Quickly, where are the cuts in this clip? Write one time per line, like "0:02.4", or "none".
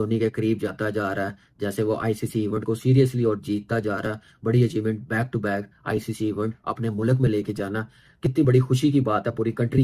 none